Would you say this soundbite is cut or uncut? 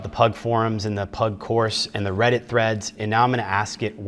uncut